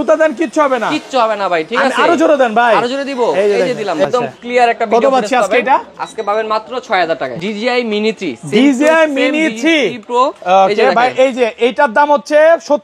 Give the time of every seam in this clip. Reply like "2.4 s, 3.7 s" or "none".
4.0 s, 7.3 s